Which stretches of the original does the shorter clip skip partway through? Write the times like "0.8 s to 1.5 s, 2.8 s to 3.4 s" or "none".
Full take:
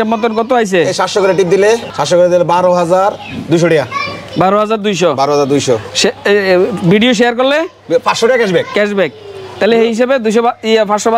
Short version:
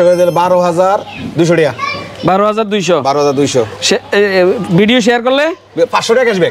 none